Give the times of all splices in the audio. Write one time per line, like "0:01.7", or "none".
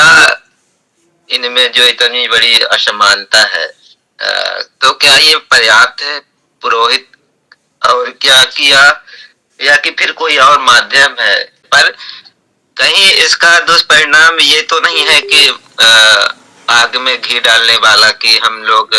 0:11.7